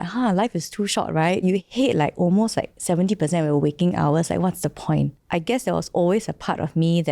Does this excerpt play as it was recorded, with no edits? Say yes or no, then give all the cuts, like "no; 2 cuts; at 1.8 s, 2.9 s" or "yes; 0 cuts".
no; 2 cuts; at 1.4 s, 5.2 s